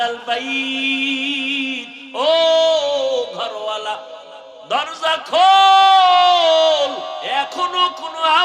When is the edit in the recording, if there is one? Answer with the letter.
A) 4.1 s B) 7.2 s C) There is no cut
B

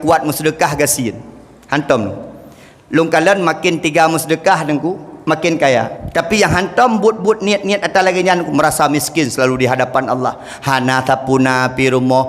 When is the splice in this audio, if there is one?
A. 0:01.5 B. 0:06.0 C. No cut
B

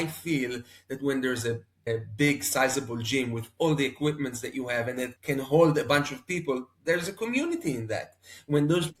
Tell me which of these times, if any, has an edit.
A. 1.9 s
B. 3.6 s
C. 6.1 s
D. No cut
A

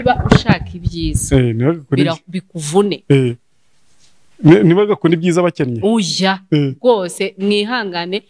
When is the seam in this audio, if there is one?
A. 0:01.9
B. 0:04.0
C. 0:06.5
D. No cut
D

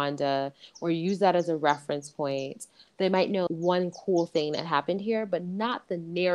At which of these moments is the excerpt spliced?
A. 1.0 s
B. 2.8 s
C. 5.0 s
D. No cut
B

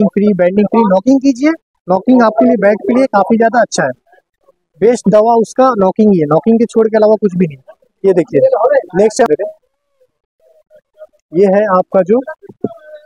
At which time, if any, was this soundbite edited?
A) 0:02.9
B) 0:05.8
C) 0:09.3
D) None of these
C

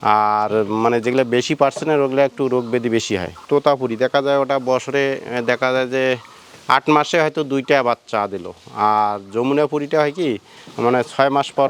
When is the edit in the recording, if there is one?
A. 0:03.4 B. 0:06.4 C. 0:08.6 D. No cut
A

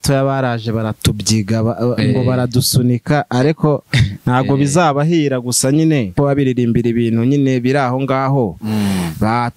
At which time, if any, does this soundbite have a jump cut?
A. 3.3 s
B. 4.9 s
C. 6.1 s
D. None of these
C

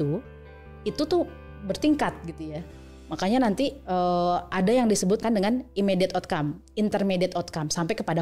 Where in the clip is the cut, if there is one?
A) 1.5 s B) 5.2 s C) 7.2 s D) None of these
B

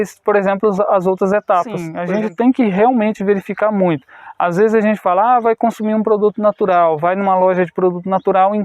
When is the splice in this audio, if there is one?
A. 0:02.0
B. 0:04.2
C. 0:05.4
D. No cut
A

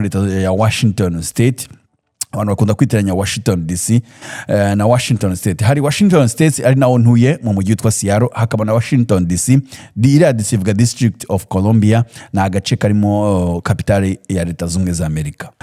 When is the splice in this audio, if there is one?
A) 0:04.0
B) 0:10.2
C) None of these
C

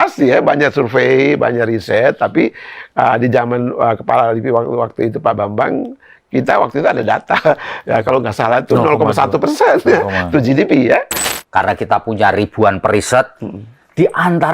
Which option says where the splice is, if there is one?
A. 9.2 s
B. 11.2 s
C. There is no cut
B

